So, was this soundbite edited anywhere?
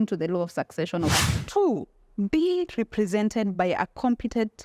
yes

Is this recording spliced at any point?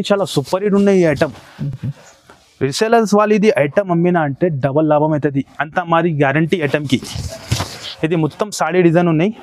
no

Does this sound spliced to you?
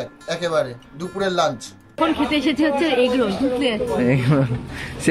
yes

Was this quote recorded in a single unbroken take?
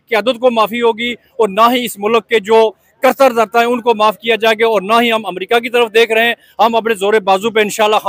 yes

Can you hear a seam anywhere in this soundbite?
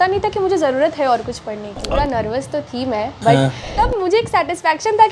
yes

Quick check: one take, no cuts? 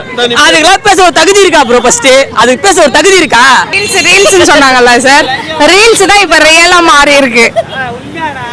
no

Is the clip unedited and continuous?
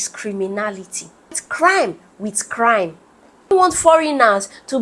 no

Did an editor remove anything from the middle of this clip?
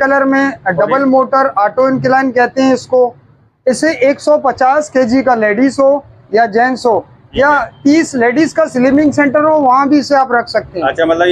no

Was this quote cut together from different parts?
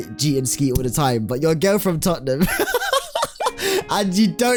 no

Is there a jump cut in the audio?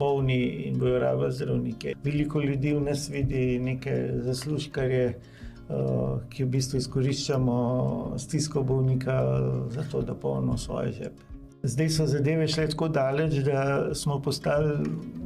yes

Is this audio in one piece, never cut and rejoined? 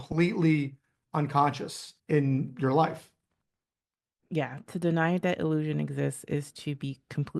yes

